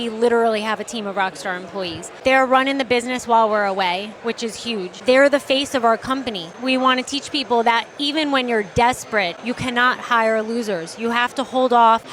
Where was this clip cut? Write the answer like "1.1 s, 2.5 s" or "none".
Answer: 9.3 s